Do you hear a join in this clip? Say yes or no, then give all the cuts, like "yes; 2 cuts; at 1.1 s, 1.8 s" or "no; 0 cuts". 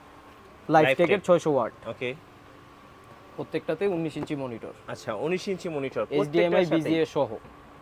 no; 0 cuts